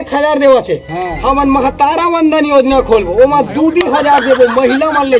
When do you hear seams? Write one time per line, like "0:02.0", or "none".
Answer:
none

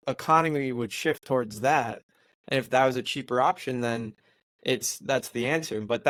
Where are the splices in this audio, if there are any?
none

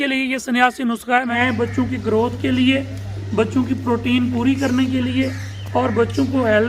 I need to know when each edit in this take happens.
0:01.3

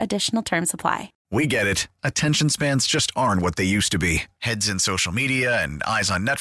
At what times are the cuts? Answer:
0:01.1

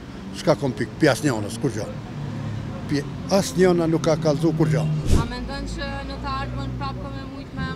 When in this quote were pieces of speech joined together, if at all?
0:05.1

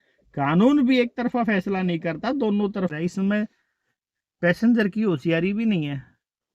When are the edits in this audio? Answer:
0:02.9

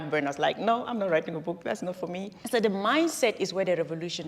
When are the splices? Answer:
0:02.3

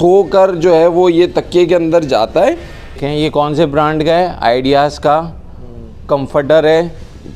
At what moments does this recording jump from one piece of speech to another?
0:03.0

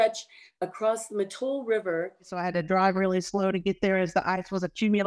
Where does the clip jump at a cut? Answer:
0:02.3

